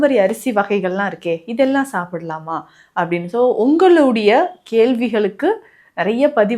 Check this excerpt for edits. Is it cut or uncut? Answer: uncut